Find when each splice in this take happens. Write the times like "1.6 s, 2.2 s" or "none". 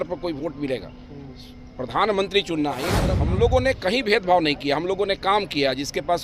2.9 s